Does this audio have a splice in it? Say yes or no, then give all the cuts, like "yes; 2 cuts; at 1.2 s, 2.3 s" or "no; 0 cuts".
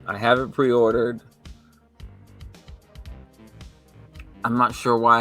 no; 0 cuts